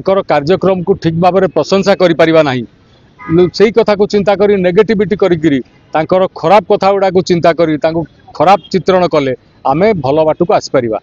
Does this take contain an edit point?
no; 0 cuts

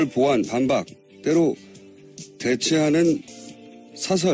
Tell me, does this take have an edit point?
no; 0 cuts

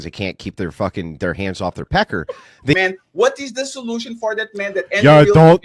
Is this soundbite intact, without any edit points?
no; 1 cut; at 2.7 s

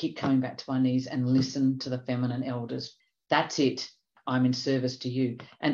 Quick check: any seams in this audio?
yes; 2 cuts; at 2.9 s, 4.1 s

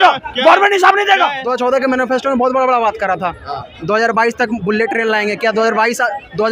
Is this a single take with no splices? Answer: no; 1 cut; at 1.4 s

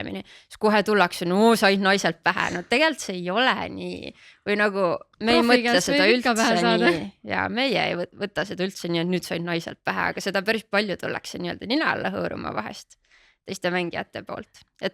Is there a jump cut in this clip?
no; 0 cuts

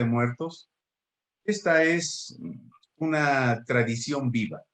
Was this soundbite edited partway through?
no; 0 cuts

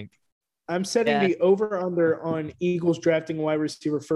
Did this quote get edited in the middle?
no; 0 cuts

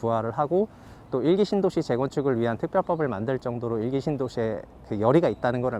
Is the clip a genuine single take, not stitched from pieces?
yes; 0 cuts

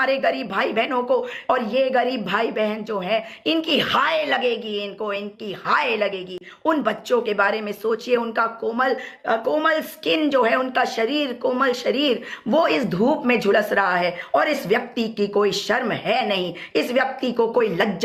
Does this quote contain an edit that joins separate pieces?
no; 0 cuts

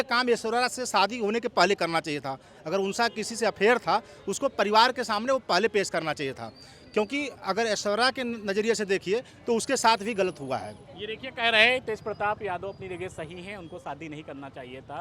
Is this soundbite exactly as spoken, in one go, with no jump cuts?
yes; 0 cuts

